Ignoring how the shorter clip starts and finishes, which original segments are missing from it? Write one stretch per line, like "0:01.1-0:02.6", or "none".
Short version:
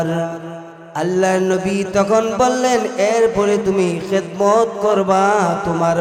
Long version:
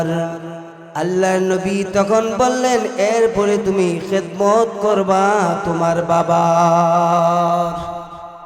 none